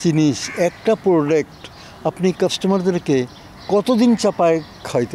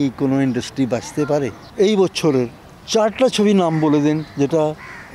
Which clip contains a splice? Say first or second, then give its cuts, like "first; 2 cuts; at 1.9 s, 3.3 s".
second; 1 cut; at 1.6 s